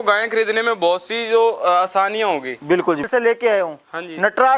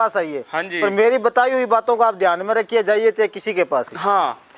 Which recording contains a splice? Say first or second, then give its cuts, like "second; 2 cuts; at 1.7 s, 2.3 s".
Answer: first; 1 cut; at 3.1 s